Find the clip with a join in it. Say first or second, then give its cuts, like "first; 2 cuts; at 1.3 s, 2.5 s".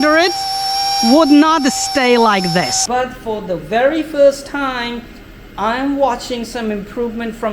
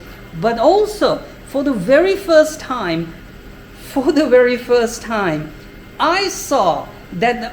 first; 1 cut; at 2.8 s